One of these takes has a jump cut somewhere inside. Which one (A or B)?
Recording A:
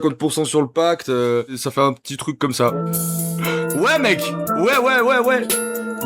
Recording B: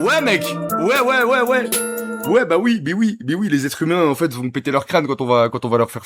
A